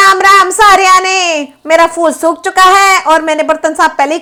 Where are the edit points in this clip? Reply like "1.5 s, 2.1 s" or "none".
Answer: none